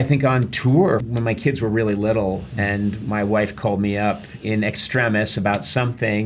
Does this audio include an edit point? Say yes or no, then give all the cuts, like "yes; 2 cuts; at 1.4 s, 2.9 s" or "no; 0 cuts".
yes; 1 cut; at 1.1 s